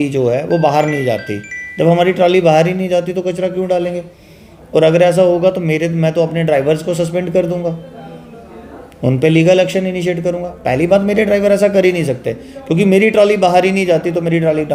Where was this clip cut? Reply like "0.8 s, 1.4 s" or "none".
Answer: none